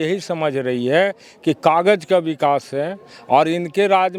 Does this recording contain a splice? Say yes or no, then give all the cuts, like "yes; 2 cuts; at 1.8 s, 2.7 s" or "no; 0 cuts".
no; 0 cuts